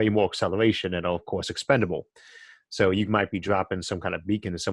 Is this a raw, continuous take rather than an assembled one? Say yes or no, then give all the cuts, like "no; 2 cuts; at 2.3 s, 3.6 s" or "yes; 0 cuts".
yes; 0 cuts